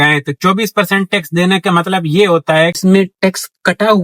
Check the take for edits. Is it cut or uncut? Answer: cut